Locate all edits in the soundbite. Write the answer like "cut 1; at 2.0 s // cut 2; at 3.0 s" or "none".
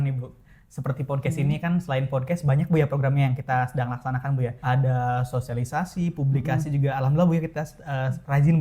cut 1; at 4.6 s